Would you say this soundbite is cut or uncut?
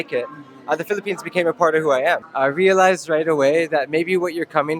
cut